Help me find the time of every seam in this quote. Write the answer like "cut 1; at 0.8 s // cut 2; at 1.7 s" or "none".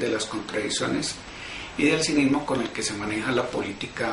none